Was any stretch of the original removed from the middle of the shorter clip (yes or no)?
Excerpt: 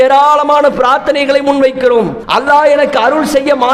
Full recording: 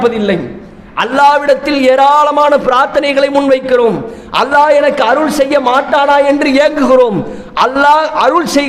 yes